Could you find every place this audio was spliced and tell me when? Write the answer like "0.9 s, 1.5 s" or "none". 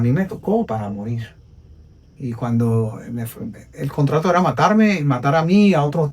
none